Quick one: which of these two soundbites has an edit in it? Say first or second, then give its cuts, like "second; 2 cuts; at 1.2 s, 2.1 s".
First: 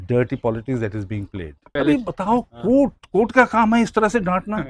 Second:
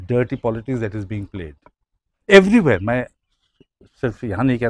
first; 1 cut; at 1.7 s